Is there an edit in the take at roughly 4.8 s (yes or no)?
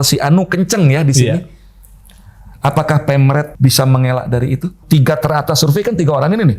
yes